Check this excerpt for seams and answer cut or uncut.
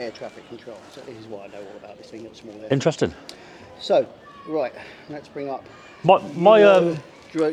uncut